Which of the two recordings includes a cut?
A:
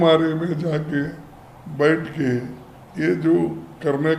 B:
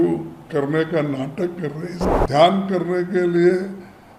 B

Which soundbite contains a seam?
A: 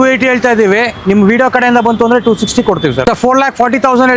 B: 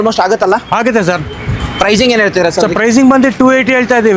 A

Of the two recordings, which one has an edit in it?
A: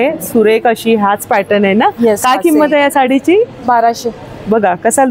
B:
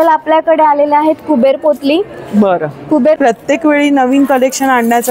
B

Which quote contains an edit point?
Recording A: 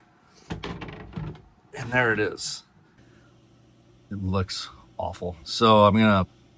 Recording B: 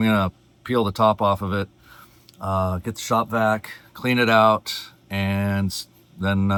A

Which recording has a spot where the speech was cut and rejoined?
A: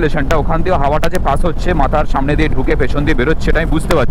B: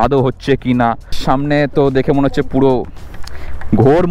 B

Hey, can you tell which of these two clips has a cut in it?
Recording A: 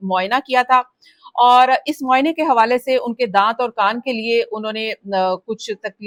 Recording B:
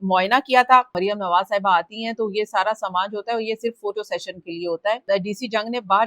B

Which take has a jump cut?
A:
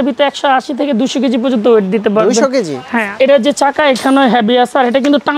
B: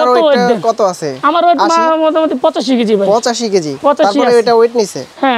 A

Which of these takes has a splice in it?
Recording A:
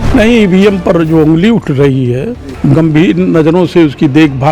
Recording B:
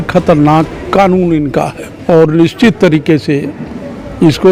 A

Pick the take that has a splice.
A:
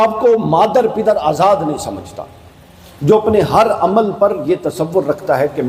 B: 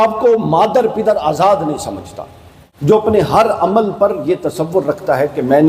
B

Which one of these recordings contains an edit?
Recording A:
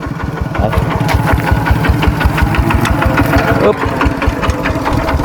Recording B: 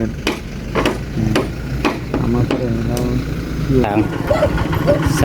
B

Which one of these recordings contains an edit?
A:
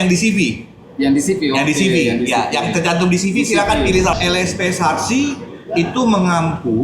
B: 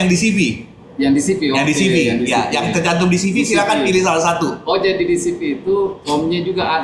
A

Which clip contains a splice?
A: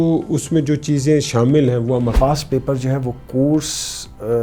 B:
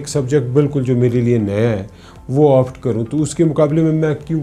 A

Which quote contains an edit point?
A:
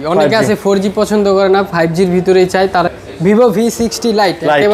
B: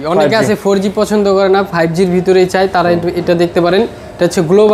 A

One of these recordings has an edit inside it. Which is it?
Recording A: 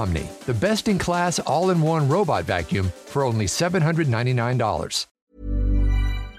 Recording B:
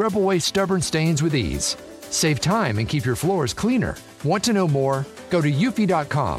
A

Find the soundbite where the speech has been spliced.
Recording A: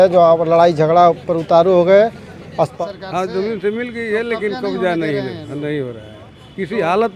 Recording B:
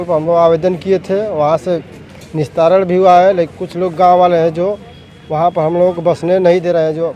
A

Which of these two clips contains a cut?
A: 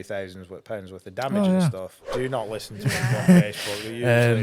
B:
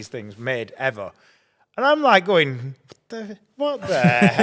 A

